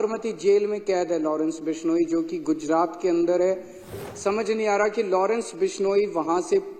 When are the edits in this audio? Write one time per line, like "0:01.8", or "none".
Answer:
0:04.0